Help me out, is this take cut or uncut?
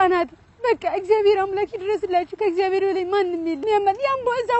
cut